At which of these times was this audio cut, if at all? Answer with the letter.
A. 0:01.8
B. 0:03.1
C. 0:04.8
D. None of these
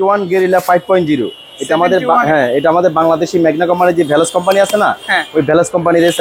D